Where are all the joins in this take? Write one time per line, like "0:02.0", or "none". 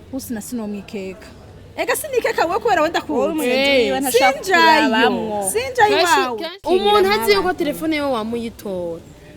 0:06.3